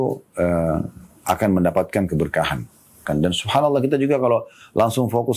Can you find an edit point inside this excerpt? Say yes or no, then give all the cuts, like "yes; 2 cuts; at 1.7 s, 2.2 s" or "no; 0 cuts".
yes; 1 cut; at 3.0 s